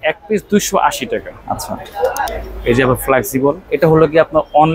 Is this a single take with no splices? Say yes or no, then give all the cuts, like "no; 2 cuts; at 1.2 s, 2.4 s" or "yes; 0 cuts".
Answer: no; 1 cut; at 2.2 s